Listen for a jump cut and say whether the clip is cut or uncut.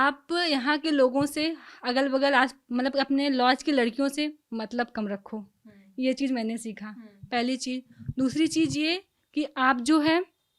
uncut